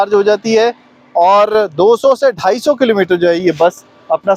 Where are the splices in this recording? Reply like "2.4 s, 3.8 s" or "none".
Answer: none